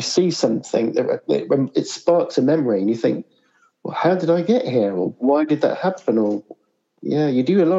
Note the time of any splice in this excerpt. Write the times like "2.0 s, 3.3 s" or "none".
6.9 s